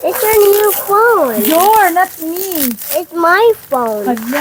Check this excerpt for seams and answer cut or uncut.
uncut